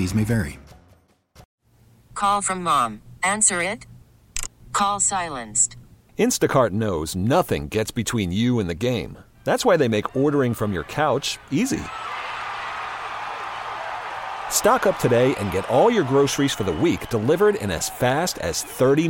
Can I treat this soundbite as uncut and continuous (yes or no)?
no